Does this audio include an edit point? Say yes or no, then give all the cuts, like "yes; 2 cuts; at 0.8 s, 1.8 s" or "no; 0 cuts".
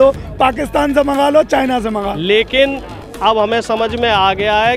yes; 1 cut; at 2.0 s